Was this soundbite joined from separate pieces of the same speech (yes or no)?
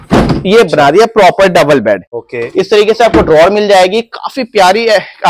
yes